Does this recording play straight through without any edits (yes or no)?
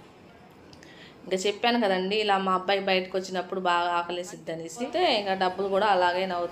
no